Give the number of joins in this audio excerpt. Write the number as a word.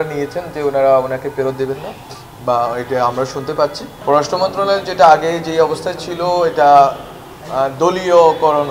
one